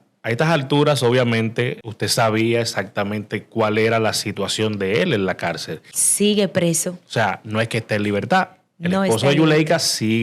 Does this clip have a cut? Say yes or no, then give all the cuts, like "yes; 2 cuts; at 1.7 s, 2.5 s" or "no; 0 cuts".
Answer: yes; 2 cuts; at 1.8 s, 6.0 s